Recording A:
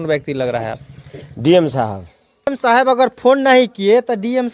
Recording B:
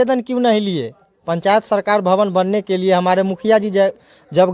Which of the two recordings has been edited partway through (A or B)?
A